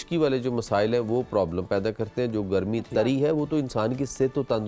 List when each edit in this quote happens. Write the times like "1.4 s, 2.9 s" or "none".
none